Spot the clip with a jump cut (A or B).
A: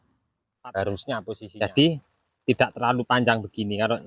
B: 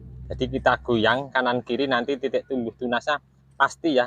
A